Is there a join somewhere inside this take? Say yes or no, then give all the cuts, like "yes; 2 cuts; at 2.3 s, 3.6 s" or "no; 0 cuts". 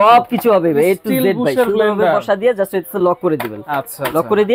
no; 0 cuts